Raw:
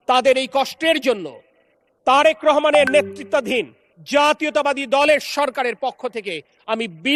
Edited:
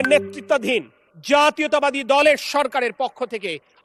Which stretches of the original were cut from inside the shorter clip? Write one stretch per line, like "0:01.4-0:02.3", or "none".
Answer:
none

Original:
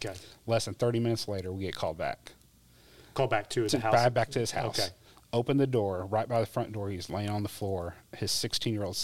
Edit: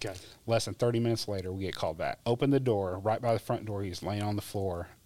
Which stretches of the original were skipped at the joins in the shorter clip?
0:02.2-0:05.2

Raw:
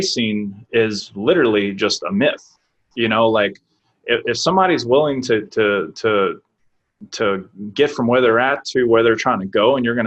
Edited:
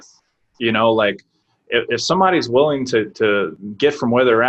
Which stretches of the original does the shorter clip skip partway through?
0:05.9-0:07.5

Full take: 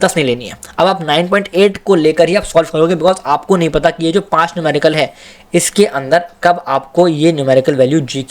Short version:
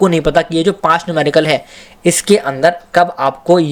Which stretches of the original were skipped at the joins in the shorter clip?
none

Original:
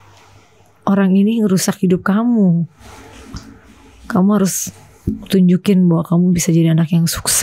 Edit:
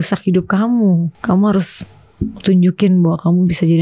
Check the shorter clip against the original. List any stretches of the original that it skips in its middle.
0:02.7-0:04.0

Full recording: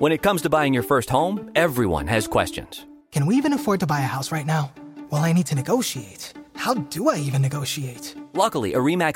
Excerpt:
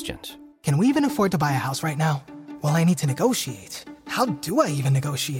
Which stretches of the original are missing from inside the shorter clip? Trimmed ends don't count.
none

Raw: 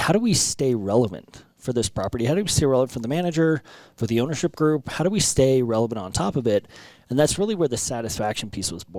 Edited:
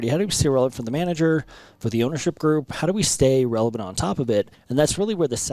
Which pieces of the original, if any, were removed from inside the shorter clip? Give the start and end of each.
0:06.8-0:07.0

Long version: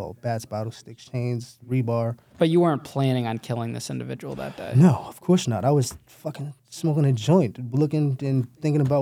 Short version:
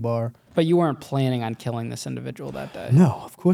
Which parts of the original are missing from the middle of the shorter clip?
none

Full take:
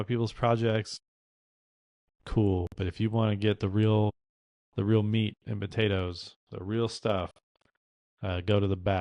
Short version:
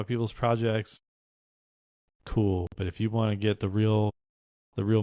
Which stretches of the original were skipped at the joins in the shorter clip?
none

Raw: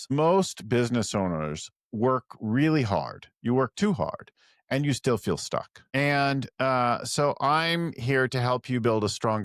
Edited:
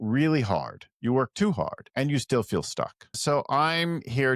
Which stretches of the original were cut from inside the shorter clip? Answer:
0:04.2-0:04.6
0:05.9-0:07.0

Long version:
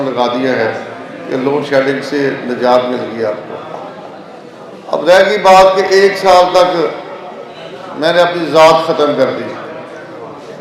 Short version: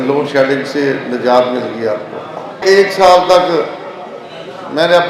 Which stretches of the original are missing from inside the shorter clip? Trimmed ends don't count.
0:04.0-0:05.9

